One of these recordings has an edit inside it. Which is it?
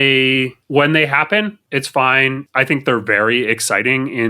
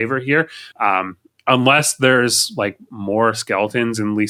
first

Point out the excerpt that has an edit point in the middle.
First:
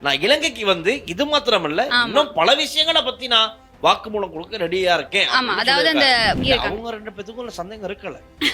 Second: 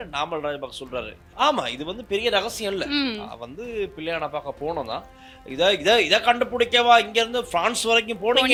first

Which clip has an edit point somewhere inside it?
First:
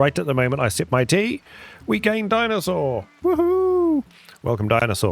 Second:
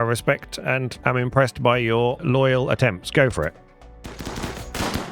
second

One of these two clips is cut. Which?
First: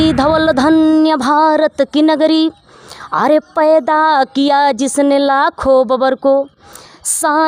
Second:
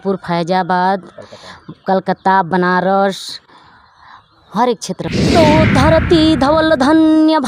second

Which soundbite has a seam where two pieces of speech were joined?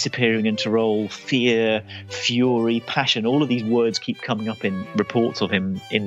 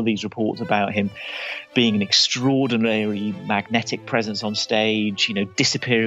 first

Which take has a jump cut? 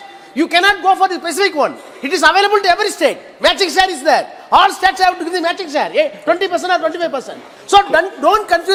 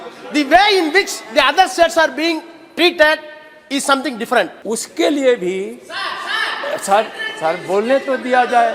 second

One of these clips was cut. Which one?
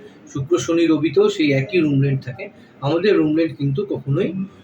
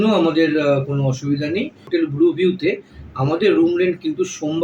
second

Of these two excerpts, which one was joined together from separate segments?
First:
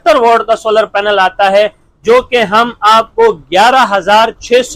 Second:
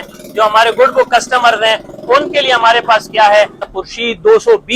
second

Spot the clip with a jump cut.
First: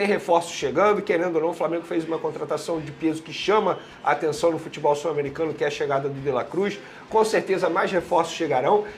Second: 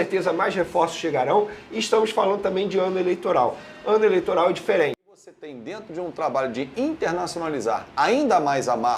second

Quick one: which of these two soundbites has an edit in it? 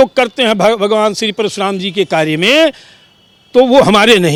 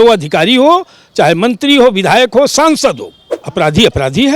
second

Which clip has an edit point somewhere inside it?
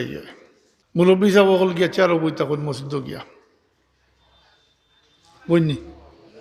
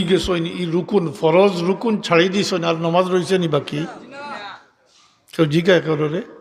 first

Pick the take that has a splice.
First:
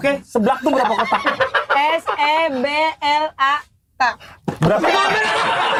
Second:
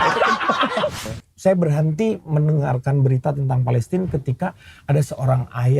second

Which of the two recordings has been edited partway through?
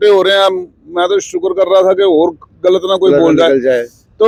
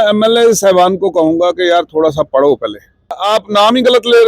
second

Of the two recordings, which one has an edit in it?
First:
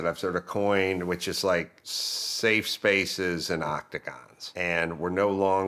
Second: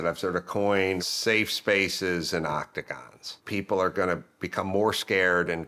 second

